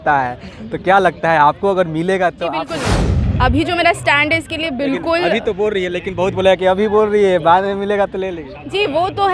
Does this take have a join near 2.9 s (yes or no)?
yes